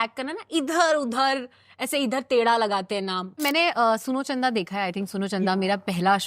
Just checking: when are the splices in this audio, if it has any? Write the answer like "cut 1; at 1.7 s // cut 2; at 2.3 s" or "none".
cut 1; at 3.4 s